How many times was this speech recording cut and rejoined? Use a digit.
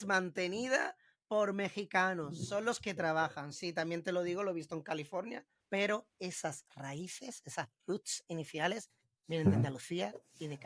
1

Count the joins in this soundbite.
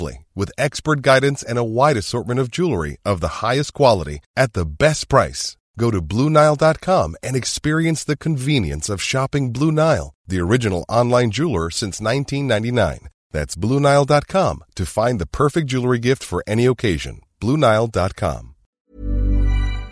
1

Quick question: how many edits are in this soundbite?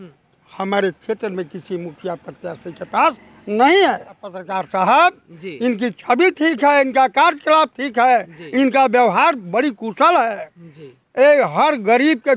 1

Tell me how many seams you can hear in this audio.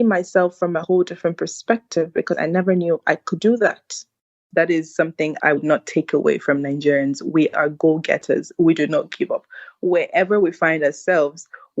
2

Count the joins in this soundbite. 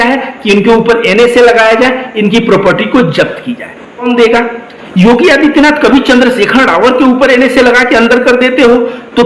1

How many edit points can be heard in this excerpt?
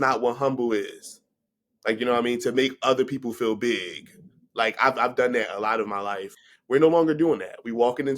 1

